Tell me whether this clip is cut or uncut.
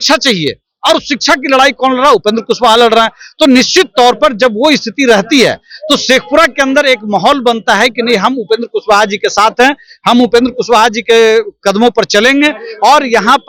uncut